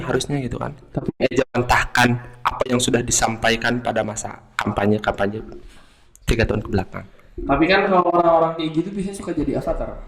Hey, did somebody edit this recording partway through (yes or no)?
no